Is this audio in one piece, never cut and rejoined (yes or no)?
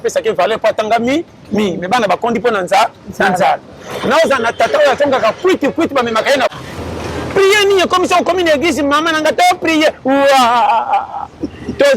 no